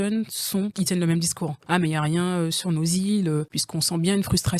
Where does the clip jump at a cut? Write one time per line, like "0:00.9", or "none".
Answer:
0:00.7
0:01.6
0:03.6